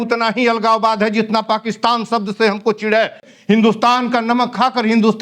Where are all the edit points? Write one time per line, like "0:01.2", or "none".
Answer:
0:03.3